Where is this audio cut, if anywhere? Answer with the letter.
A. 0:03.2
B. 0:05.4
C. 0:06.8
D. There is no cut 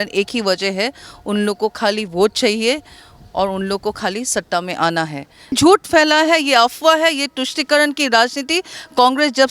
B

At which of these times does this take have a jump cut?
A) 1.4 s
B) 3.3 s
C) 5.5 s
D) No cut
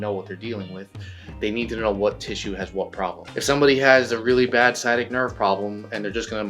B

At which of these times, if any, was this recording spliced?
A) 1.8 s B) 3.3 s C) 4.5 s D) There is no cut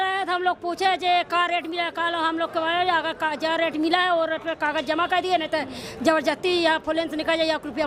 D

